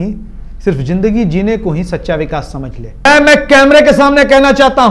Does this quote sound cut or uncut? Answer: cut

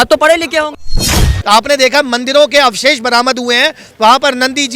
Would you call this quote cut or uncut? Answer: cut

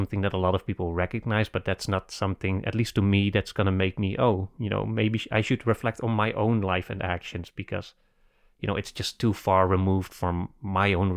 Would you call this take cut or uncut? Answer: uncut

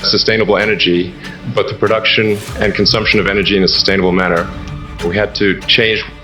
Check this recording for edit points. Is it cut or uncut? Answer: cut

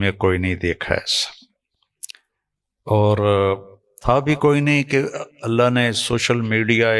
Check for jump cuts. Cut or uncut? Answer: uncut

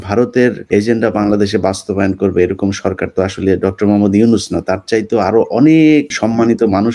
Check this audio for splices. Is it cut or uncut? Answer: uncut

